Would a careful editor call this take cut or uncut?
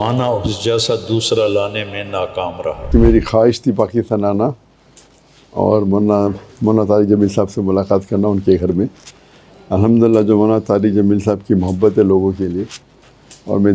cut